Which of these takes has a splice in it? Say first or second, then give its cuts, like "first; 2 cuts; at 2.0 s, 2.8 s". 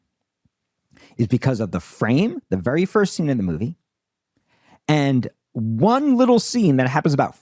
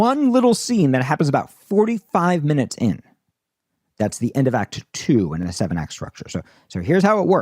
second; 1 cut; at 5.5 s